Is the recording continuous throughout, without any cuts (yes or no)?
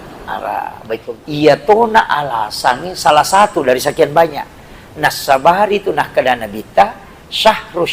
no